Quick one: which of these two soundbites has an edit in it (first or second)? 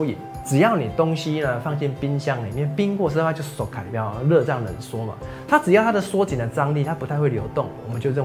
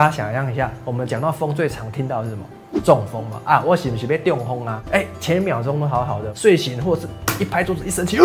second